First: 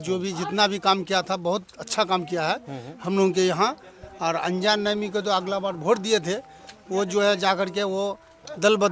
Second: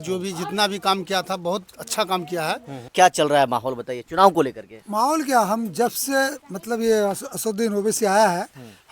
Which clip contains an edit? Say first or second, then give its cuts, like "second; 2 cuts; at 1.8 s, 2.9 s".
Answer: second; 1 cut; at 2.8 s